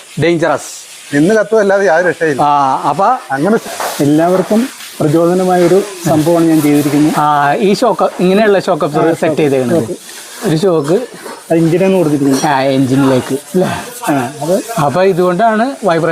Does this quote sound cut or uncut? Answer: cut